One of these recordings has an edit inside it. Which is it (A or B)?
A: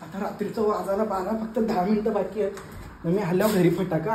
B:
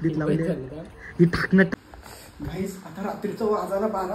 B